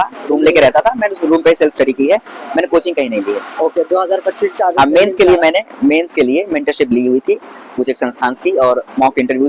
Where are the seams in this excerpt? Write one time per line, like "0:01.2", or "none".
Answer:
none